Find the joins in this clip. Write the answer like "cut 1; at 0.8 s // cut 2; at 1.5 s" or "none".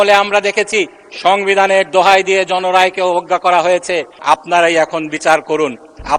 cut 1; at 4.1 s